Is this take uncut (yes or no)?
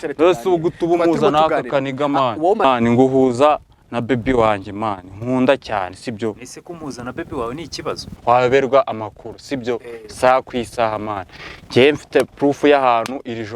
no